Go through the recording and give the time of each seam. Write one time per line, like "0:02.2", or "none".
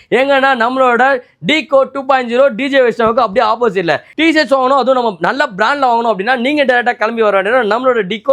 none